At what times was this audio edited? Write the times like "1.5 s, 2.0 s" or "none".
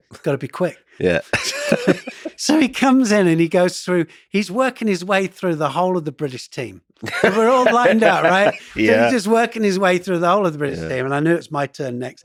none